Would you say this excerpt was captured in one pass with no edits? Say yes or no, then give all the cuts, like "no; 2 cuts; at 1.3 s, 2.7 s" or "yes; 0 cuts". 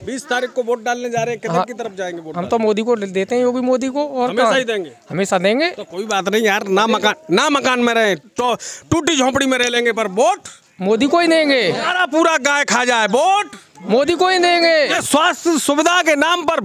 no; 3 cuts; at 8.3 s, 11.9 s, 15.0 s